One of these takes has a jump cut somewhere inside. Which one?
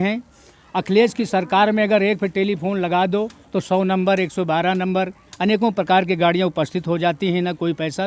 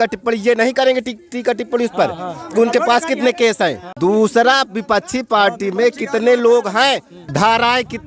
second; 2 cuts; at 3.9 s, 7.2 s

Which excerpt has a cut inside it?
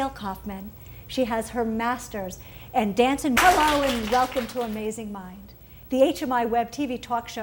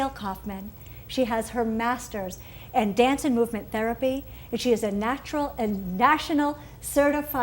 second; 1 cut; at 3.4 s

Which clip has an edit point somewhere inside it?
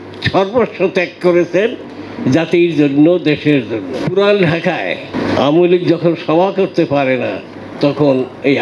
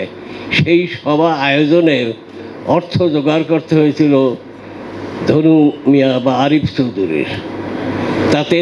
first; 2 cuts; at 4.0 s, 5.1 s

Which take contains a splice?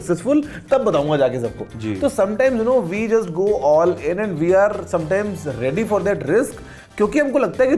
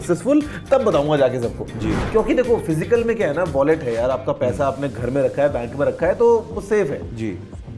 second; 1 cut; at 2.0 s

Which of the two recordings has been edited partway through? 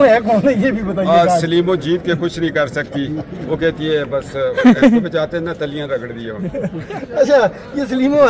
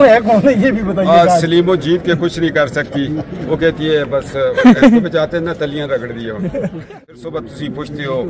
second; 1 cut; at 7.1 s

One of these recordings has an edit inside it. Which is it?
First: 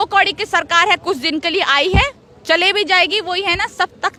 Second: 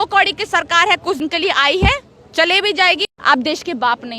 second; 2 cuts; at 1.2 s, 3.1 s

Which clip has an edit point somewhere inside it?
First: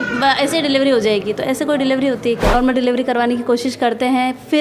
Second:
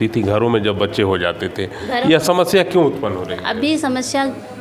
first; 1 cut; at 2.5 s

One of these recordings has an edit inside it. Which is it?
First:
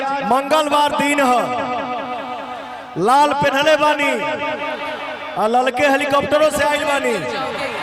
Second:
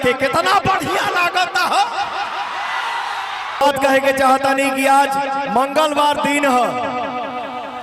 second; 1 cut; at 3.6 s

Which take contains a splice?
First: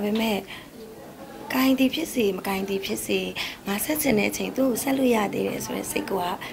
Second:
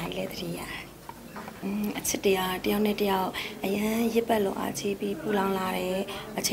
second; 1 cut; at 1.5 s

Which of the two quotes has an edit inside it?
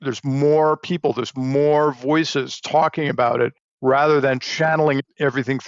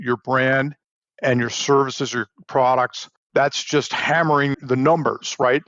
second; 2 cuts; at 3.3 s, 4.5 s

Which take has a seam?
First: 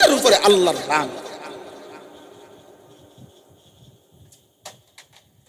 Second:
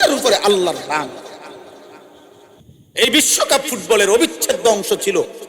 second; 1 cut; at 2.6 s

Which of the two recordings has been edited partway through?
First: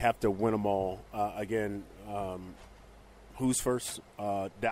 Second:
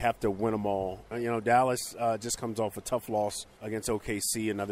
second; 2 cuts; at 1.0 s, 3.5 s

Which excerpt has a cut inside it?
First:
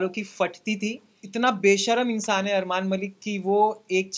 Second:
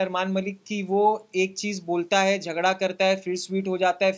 first; 1 cut; at 1.2 s

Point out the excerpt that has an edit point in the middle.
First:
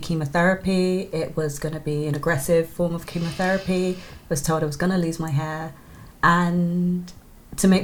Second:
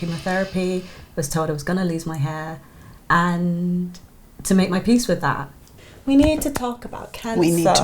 second; 1 cut; at 5.7 s

